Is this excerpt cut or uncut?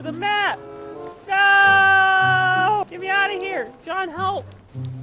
cut